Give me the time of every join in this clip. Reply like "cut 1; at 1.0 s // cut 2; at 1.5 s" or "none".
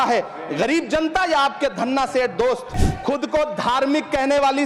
cut 1; at 2.8 s